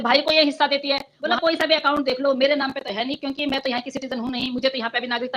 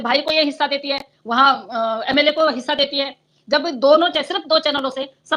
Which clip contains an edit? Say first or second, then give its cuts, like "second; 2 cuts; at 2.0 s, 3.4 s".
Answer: first; 1 cut; at 1.2 s